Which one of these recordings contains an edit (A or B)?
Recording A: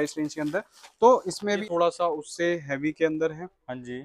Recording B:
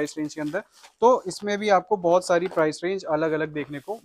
A